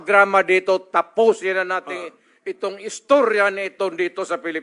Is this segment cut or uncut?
uncut